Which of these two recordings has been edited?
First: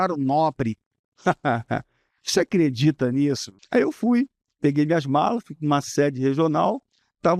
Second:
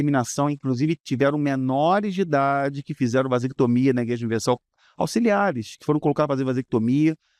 first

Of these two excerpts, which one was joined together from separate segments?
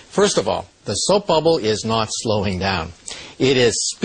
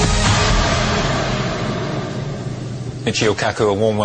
second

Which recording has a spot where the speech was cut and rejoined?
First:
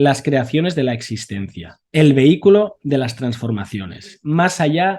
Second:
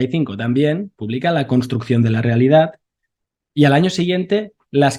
first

